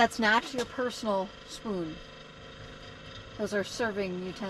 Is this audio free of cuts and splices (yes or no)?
yes